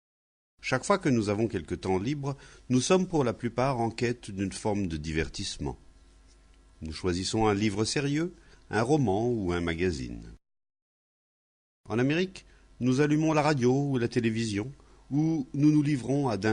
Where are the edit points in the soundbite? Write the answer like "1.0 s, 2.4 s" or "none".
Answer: 15.3 s